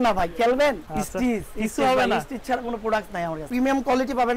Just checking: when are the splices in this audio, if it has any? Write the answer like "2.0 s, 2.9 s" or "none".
0.8 s, 3.4 s